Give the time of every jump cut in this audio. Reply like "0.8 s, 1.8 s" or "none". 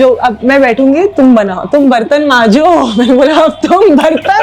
none